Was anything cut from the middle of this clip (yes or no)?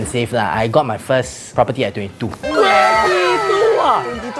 no